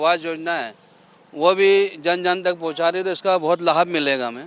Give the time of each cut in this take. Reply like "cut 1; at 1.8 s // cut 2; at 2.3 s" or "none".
none